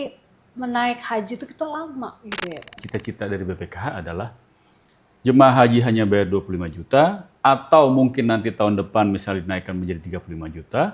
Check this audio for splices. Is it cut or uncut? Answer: cut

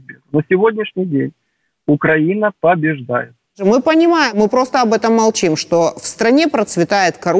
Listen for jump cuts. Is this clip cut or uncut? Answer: cut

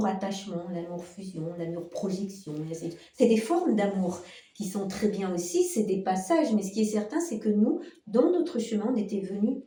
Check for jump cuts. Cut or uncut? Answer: uncut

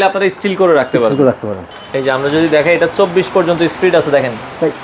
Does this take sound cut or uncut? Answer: cut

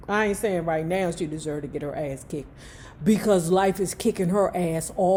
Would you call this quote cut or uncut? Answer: uncut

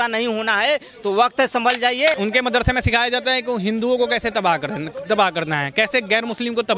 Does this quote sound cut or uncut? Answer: cut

